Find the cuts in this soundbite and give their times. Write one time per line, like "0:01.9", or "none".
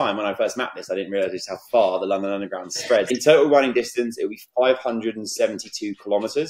0:03.1